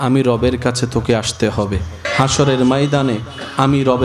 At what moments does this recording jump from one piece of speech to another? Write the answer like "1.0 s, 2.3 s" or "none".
2.0 s